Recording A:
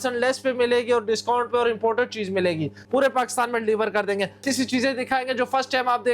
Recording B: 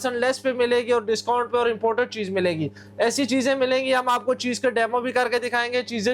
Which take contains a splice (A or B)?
A